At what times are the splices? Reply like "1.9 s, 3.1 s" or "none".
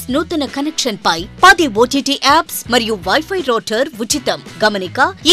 none